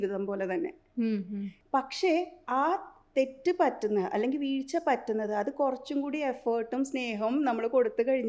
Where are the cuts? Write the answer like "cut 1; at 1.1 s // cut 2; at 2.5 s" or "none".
cut 1; at 1.6 s